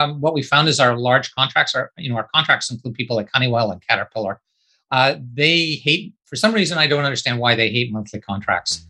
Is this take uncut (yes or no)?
yes